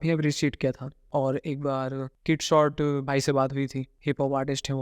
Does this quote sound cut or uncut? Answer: cut